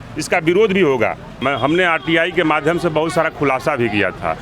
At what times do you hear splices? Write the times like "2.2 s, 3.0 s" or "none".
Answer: 1.4 s